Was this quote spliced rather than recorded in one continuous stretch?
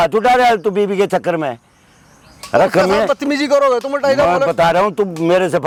no; 0 cuts

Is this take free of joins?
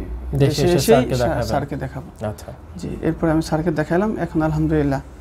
yes; 0 cuts

